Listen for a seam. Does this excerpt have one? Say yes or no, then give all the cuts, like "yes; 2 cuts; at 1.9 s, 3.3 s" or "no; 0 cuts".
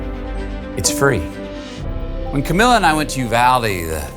yes; 1 cut; at 2.7 s